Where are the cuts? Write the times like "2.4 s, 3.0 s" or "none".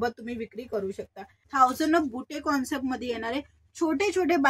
1.4 s